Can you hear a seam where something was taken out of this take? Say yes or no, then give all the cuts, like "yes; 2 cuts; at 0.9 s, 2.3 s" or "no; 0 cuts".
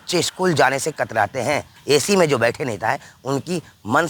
yes; 1 cut; at 1.7 s